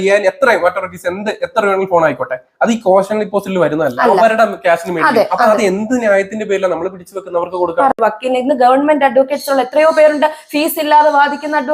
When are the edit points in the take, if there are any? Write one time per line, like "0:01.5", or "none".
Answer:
0:07.9